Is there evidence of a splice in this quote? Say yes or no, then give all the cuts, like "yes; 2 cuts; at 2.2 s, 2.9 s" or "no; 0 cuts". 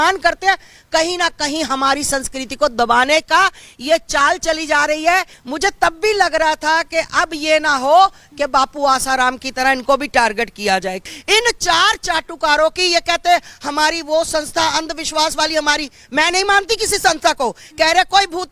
yes; 2 cuts; at 5.4 s, 11.0 s